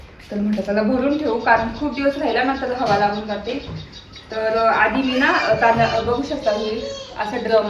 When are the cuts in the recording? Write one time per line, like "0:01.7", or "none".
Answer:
none